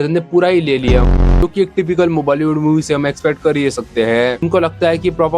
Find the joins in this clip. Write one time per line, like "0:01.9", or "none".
0:01.4
0:04.4